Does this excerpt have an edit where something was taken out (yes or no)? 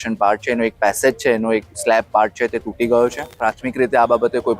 yes